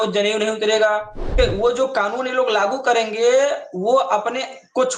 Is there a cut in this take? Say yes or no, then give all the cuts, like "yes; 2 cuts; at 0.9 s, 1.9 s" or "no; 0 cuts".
yes; 1 cut; at 1.4 s